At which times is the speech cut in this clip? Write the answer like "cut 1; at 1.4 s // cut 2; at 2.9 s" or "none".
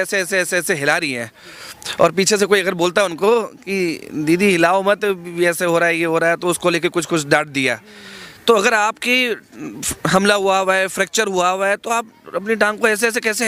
none